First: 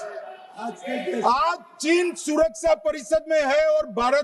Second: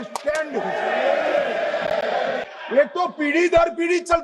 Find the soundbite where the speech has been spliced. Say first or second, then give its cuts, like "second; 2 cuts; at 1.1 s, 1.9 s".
second; 1 cut; at 2.5 s